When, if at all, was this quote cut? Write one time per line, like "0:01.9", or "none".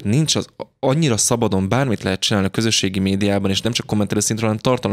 0:03.6